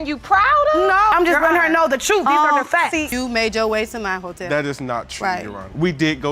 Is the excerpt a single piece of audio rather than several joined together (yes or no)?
no